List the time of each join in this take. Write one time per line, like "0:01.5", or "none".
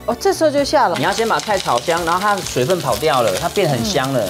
0:00.9